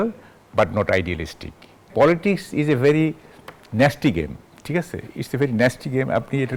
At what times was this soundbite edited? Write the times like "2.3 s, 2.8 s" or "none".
1.9 s